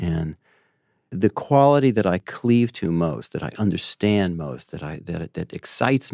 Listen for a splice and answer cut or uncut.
cut